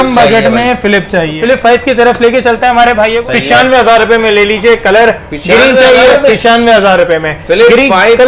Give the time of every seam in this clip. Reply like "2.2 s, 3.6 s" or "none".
1.4 s, 3.2 s